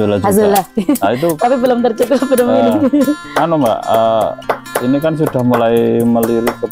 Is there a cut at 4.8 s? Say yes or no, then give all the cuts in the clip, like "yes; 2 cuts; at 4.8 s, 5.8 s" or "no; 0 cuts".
no; 0 cuts